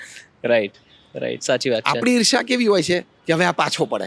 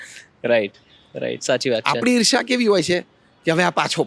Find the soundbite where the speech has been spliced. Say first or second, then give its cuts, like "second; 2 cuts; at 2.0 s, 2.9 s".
first; 1 cut; at 3.1 s